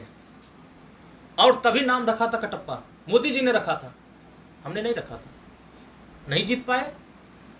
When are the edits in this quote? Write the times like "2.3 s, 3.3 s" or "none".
none